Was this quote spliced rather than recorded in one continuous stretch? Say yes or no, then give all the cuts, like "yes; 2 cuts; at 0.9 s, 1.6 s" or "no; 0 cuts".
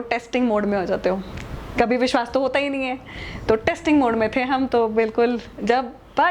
no; 0 cuts